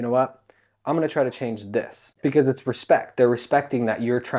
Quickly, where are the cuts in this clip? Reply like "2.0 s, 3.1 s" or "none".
2.0 s